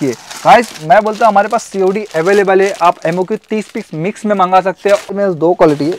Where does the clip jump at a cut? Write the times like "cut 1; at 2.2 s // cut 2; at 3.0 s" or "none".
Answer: cut 1; at 5.1 s